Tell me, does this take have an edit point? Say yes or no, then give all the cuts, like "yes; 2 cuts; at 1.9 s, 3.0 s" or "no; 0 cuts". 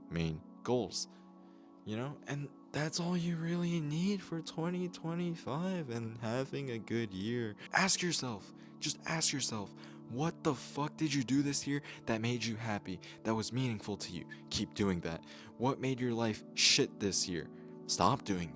yes; 1 cut; at 7.6 s